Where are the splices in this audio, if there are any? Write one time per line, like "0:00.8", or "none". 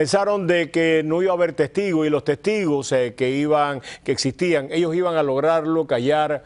0:05.0